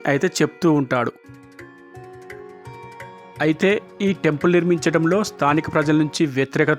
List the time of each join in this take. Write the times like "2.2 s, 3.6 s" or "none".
1.1 s, 3.4 s